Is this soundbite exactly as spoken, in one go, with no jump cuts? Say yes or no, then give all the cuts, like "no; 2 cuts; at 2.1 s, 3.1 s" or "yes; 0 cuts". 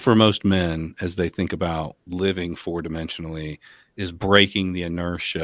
no; 1 cut; at 2.0 s